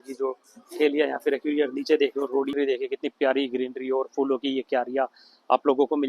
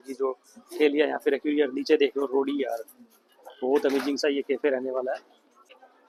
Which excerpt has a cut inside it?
first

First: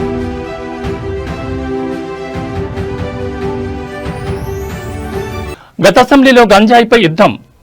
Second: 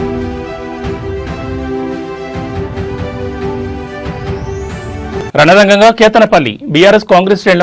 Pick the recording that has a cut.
second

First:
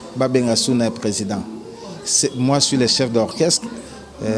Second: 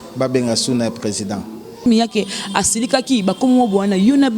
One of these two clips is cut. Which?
second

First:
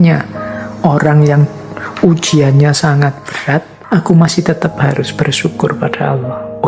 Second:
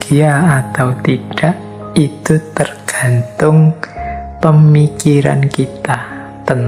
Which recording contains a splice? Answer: first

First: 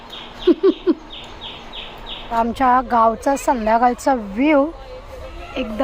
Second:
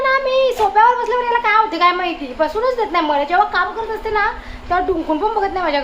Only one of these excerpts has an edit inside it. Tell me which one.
first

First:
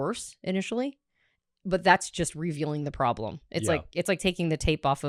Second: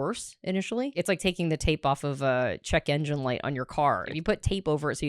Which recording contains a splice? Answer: second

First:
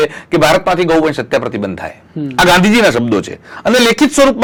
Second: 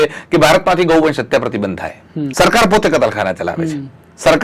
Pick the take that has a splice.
second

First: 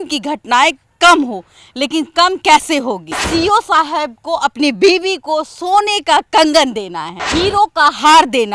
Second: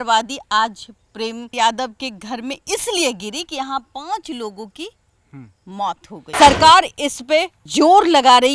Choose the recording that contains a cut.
second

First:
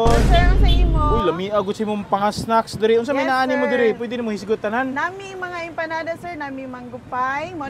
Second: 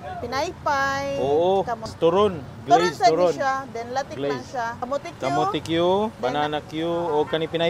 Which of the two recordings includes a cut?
second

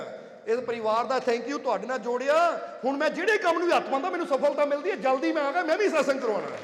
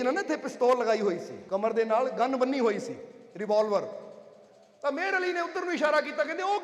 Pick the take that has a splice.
second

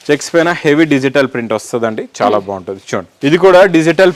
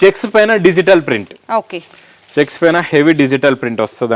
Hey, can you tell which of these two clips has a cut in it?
first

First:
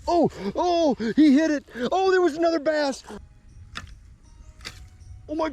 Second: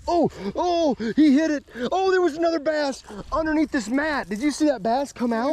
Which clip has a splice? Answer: first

